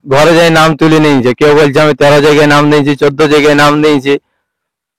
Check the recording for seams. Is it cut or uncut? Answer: uncut